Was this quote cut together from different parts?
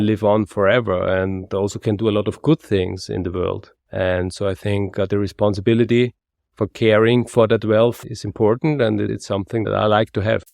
yes; 2 cuts; at 8.0 s, 9.4 s

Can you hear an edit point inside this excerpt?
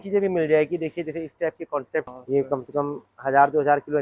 yes; 1 cut; at 2.2 s

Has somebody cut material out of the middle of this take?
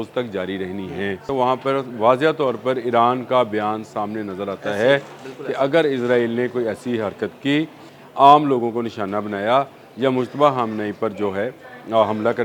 yes; 2 cuts; at 1.3 s, 7.9 s

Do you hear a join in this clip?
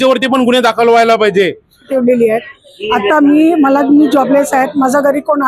yes; 1 cut; at 1.9 s

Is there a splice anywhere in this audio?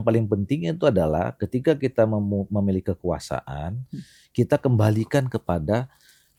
no; 0 cuts

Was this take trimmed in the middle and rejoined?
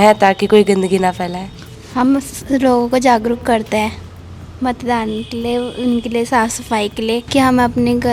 yes; 2 cuts; at 1.6 s, 7.3 s

